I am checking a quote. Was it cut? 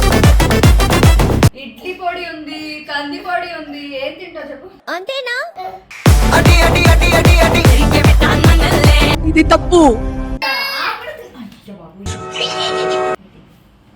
yes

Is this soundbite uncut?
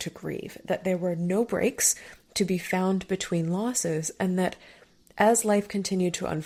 yes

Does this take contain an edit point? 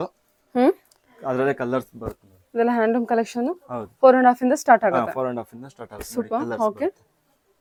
no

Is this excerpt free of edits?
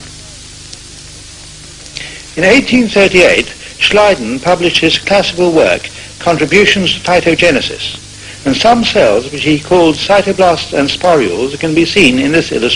no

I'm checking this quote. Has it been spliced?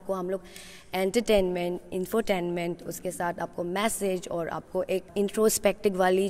yes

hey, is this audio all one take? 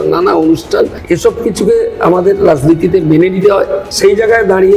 no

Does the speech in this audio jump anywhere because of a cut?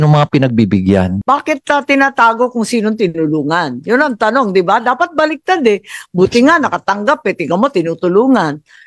yes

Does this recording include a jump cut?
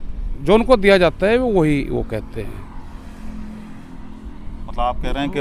no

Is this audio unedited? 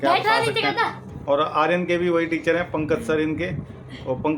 no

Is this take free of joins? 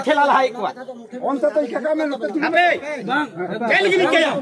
yes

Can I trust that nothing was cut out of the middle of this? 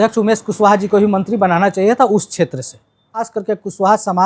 no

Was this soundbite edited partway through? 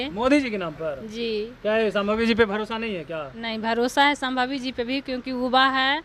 no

